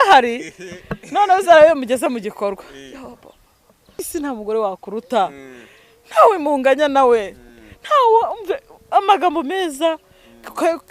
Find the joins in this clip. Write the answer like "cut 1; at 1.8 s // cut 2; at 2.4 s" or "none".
cut 1; at 4.0 s